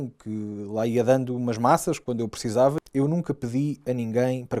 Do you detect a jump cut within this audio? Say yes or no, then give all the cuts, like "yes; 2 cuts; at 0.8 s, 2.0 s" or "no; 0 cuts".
yes; 1 cut; at 2.8 s